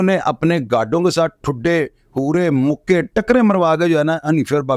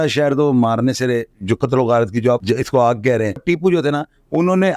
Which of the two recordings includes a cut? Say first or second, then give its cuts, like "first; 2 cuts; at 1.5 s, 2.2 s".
second; 3 cuts; at 1.3 s, 2.4 s, 3.4 s